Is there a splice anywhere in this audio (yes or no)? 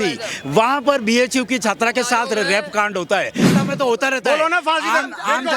yes